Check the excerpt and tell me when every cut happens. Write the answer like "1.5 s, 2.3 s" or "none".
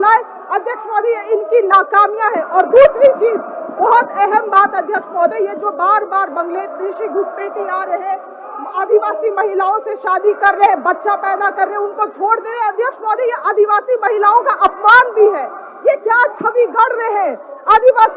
none